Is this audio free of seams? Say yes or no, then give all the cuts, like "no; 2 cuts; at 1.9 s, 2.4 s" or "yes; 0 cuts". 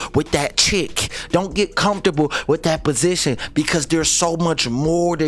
yes; 0 cuts